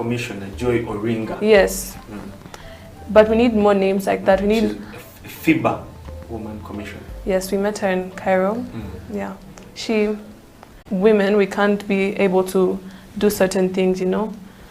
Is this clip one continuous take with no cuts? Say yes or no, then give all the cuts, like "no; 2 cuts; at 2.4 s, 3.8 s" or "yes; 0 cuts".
no; 1 cut; at 10.8 s